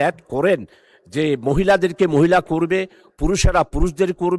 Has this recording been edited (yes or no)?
no